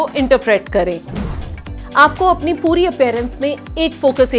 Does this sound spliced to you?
yes; 1 cut; at 1.5 s

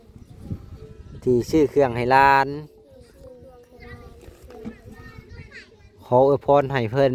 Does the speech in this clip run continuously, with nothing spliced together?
yes; 0 cuts

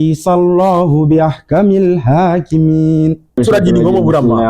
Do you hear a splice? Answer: yes; 1 cut; at 3.4 s

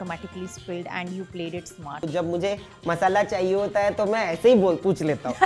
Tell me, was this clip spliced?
yes; 1 cut; at 2.0 s

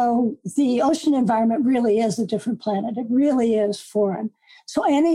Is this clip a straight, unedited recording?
yes; 0 cuts

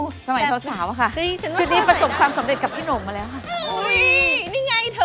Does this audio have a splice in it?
yes; 1 cut; at 1.1 s

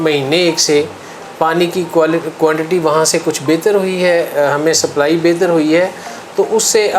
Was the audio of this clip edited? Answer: no; 0 cuts

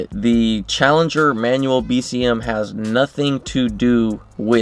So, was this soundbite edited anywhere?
no; 0 cuts

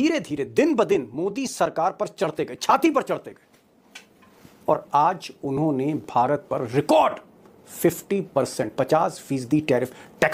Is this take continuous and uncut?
yes; 0 cuts

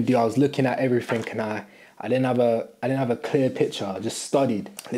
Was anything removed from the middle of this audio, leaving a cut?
no; 0 cuts

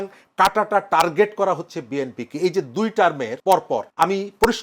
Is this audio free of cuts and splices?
no; 1 cut; at 3.5 s

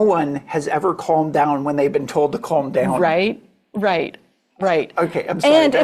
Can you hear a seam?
no; 0 cuts

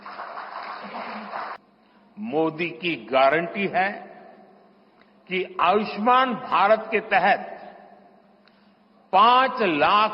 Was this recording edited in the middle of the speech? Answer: yes; 1 cut; at 1.6 s

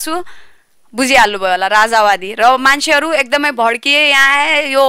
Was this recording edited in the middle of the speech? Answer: no; 0 cuts

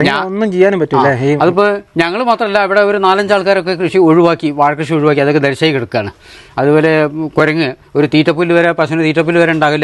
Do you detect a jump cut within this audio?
no; 0 cuts

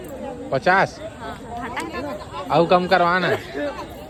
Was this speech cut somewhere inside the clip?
no; 0 cuts

